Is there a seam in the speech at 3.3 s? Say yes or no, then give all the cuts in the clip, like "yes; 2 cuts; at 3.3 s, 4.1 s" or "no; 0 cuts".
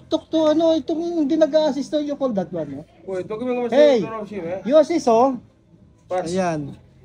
no; 0 cuts